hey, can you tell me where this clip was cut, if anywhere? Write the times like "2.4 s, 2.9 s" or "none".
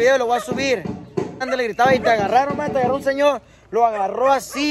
1.5 s